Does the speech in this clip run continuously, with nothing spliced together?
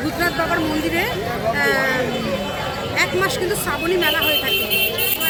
yes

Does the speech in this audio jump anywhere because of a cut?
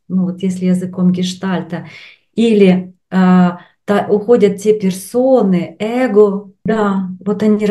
yes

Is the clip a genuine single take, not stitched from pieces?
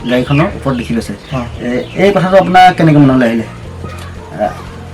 yes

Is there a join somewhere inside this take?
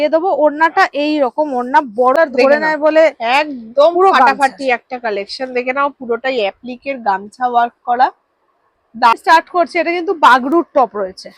yes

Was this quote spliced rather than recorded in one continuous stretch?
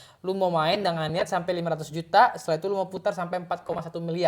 no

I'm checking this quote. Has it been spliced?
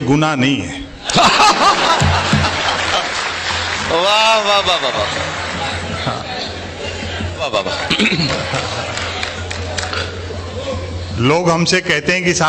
yes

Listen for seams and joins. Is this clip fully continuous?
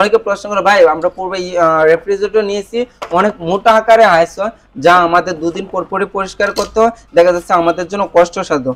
yes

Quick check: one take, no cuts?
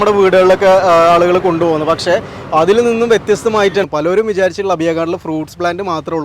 no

